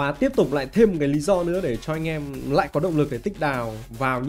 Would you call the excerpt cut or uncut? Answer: uncut